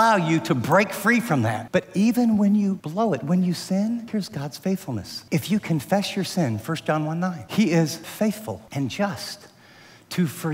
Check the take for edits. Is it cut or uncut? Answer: cut